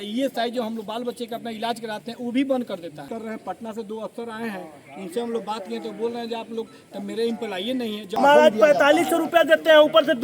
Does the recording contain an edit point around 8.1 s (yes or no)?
yes